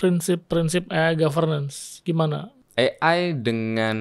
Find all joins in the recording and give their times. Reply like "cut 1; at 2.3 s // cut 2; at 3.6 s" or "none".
cut 1; at 2.5 s

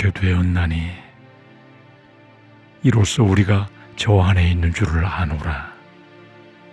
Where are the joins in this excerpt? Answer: cut 1; at 1.2 s // cut 2; at 2.8 s // cut 3; at 5.7 s

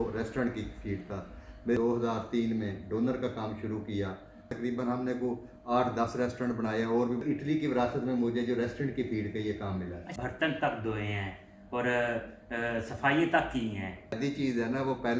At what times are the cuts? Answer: cut 1; at 1.8 s // cut 2; at 4.5 s // cut 3; at 7.2 s // cut 4; at 10.0 s // cut 5; at 14.2 s

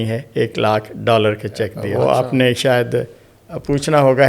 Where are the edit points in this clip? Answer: cut 1; at 1.8 s

